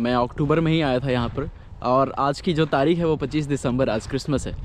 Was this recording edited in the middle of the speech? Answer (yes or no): no